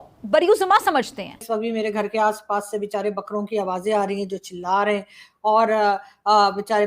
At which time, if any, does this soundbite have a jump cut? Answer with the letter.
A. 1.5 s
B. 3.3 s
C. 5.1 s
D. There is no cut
A